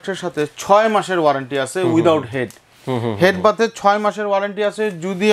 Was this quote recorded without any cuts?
yes; 0 cuts

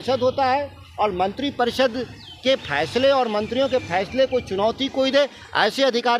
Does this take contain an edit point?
no; 0 cuts

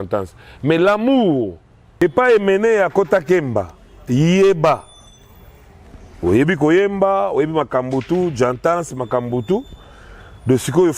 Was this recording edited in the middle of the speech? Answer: yes; 1 cut; at 2.0 s

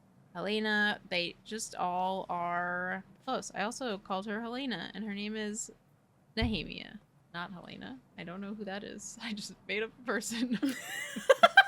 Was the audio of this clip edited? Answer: yes; 2 cuts; at 3.1 s, 7.2 s

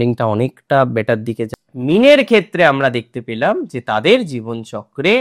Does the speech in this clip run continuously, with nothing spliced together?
no; 1 cut; at 1.5 s

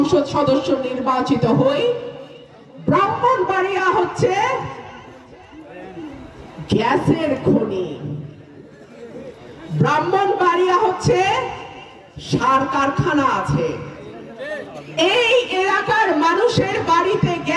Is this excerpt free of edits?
yes; 0 cuts

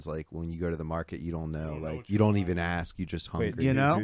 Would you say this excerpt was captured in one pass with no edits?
yes; 0 cuts

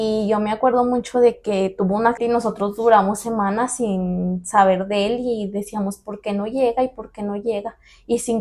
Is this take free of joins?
no; 1 cut; at 2.2 s

